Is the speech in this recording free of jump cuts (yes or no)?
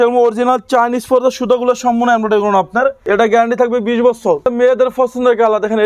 no